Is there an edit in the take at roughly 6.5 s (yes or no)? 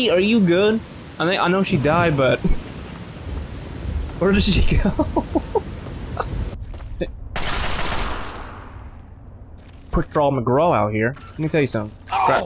yes